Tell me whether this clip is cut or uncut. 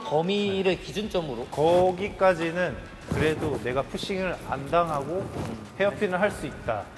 uncut